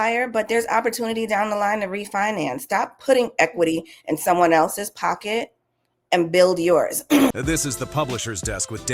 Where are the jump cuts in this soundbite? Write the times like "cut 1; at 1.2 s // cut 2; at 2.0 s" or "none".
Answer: cut 1; at 7.4 s